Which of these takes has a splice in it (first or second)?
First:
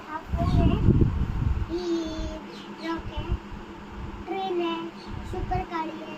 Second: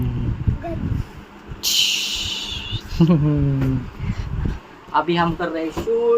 second